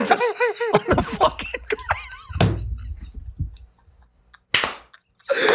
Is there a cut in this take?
no; 0 cuts

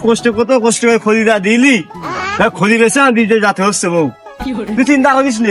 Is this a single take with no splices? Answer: yes; 0 cuts

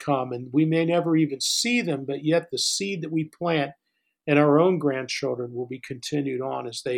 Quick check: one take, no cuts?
yes; 0 cuts

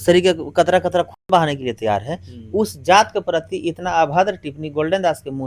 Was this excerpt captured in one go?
yes; 0 cuts

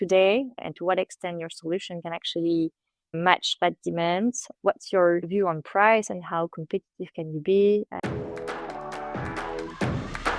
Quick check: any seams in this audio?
yes; 1 cut; at 7.9 s

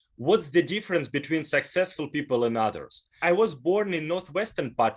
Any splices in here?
yes; 1 cut; at 3.2 s

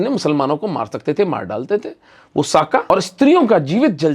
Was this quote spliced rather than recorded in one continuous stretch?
yes; 1 cut; at 2.9 s

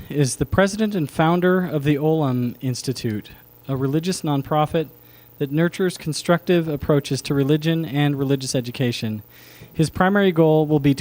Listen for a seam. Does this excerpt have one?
no; 0 cuts

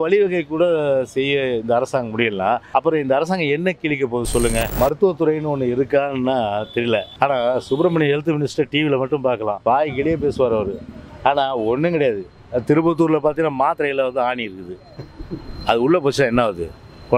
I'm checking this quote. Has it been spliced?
yes; 4 cuts; at 2.6 s, 4.7 s, 7.1 s, 9.6 s

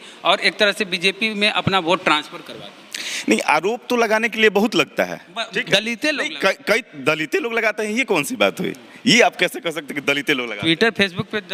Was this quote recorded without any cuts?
yes; 0 cuts

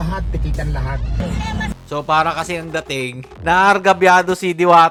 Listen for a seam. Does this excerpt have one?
no; 0 cuts

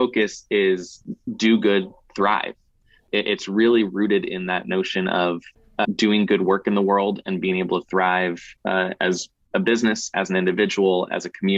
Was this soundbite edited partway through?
no; 0 cuts

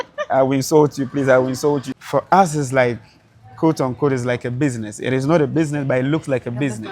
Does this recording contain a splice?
yes; 1 cut; at 1.9 s

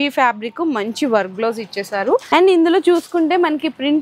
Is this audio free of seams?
no; 1 cut; at 2.2 s

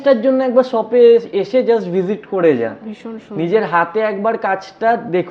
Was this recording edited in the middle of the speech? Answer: no; 0 cuts

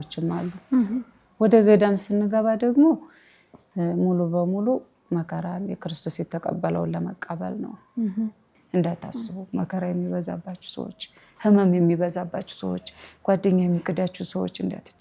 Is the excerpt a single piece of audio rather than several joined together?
no; 1 cut; at 8.6 s

